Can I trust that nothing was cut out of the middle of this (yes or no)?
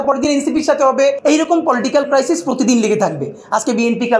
no